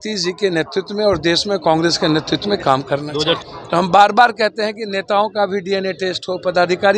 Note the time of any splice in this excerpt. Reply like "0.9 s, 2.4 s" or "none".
3.5 s

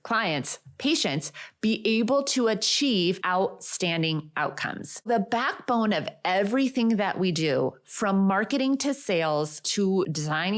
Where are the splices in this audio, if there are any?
3.2 s, 5.1 s, 9.9 s

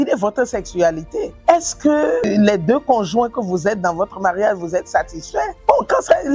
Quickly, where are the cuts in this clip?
1.3 s

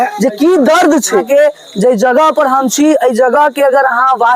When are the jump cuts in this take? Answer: 1.2 s

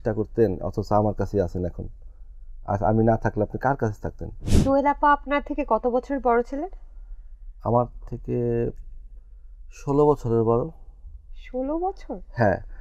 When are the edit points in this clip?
4.4 s

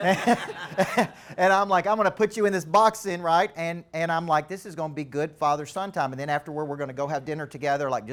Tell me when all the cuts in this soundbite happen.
none

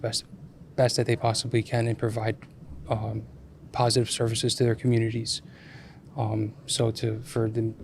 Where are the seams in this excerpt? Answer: none

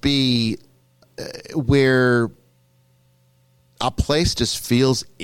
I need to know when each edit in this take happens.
none

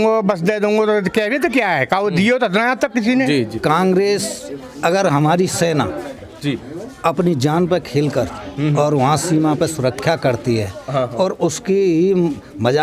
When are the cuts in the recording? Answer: 3.5 s

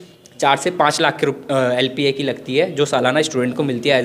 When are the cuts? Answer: none

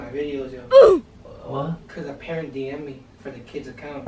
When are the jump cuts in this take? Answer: 1.9 s

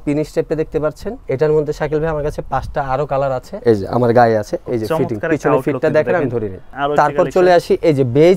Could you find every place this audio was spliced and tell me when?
1.1 s, 3.5 s, 6.7 s

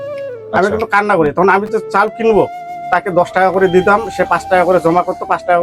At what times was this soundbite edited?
2.7 s

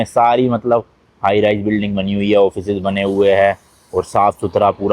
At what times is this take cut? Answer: none

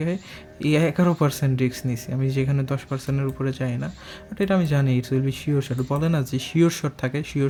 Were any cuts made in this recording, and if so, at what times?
none

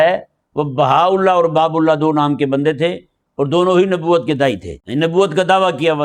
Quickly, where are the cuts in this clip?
4.7 s

